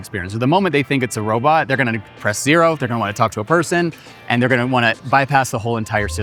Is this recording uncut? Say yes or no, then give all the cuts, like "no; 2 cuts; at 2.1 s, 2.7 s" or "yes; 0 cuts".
yes; 0 cuts